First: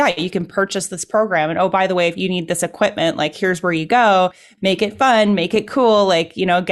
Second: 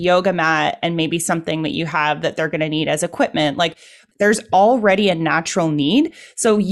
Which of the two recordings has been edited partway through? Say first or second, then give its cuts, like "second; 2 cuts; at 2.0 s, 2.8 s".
second; 1 cut; at 4.1 s